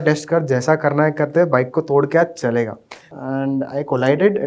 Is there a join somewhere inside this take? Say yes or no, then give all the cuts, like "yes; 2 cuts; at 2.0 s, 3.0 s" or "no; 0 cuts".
yes; 1 cut; at 3.2 s